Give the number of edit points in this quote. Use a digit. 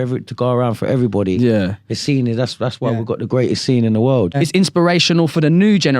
1